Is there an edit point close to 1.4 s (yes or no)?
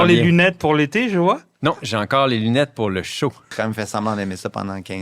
no